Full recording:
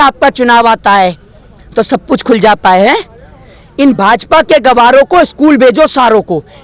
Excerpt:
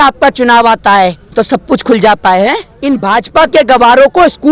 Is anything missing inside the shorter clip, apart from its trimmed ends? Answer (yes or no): yes